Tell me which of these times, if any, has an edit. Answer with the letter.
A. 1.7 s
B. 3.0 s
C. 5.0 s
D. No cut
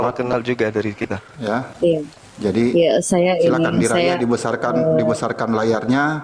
A